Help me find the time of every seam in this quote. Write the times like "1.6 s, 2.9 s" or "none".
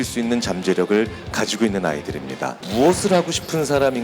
2.6 s